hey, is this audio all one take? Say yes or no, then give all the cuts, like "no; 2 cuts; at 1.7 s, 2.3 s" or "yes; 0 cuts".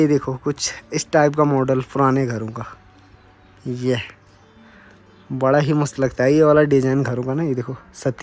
yes; 0 cuts